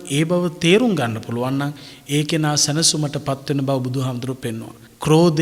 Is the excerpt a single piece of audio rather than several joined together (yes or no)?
yes